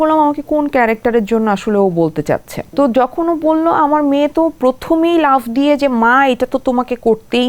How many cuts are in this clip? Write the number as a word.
one